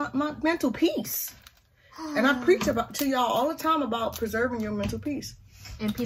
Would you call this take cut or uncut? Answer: uncut